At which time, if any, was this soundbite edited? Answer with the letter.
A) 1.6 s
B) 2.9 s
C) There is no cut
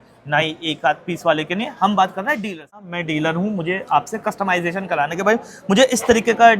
B